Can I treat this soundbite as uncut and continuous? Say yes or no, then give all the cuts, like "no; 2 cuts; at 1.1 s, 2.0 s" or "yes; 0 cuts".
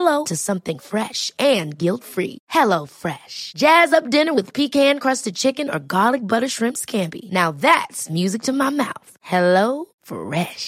yes; 0 cuts